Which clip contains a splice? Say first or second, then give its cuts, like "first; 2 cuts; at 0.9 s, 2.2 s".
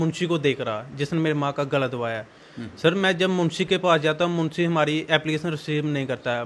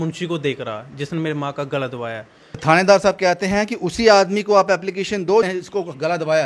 second; 2 cuts; at 2.6 s, 5.5 s